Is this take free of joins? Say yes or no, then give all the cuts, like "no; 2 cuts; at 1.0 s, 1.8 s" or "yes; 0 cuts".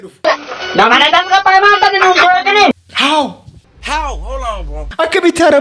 yes; 0 cuts